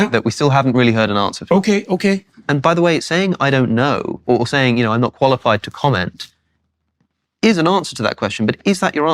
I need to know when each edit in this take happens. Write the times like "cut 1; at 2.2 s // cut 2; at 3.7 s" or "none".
cut 1; at 2.4 s